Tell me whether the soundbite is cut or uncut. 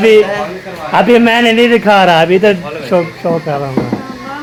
uncut